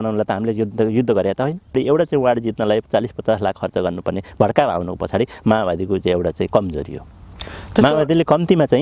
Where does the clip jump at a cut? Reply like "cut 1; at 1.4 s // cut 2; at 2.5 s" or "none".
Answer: cut 1; at 1.8 s